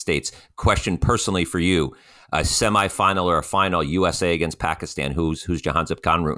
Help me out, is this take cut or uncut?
uncut